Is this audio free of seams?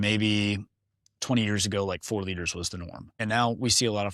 no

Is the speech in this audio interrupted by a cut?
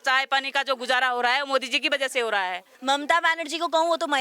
yes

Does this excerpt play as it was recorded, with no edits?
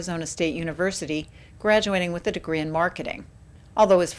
no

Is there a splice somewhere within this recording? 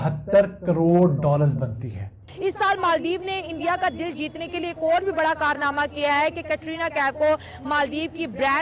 yes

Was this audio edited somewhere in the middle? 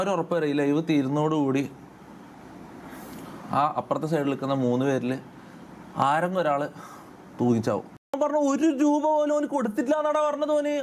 yes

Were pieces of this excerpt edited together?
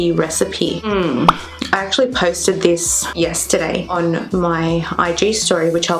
no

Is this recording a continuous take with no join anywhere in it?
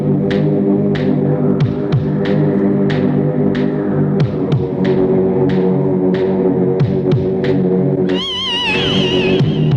yes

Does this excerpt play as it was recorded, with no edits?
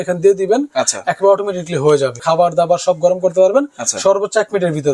no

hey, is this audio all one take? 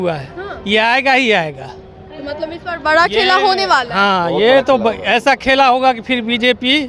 yes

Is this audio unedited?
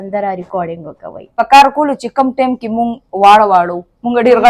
no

